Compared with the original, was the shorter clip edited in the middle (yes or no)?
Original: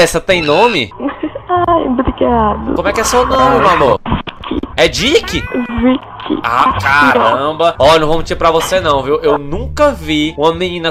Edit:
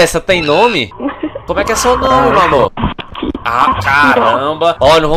yes